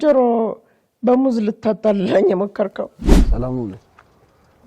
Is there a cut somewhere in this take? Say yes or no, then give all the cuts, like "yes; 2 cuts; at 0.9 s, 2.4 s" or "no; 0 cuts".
yes; 1 cut; at 3.0 s